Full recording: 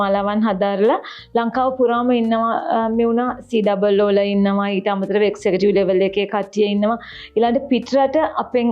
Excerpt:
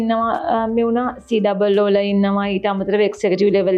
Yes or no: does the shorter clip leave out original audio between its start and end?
no